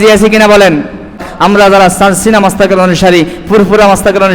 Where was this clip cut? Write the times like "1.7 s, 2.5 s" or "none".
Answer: 1.3 s